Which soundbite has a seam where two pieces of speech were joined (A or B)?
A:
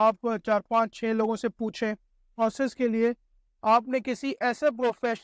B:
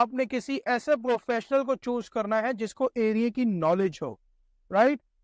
A